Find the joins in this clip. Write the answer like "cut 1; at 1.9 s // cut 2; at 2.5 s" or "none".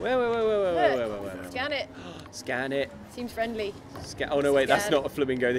none